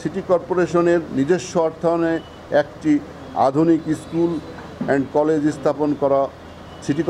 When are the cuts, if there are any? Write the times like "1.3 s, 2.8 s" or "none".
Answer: none